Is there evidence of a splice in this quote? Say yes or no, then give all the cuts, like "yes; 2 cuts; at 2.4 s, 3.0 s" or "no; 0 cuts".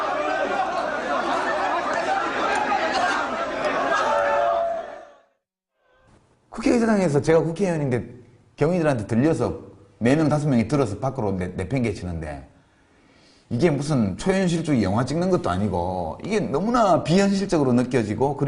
yes; 1 cut; at 10.1 s